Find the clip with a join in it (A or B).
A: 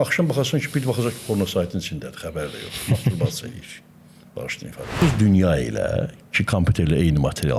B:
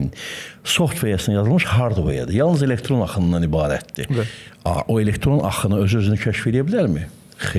A